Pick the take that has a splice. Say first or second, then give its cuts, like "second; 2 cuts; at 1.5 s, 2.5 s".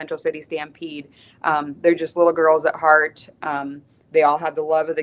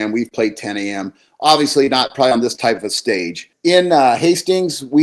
second; 1 cut; at 3.5 s